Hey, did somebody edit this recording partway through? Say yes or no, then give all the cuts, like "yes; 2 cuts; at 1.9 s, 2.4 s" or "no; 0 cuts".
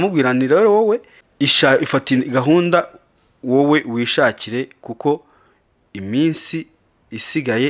yes; 1 cut; at 1.2 s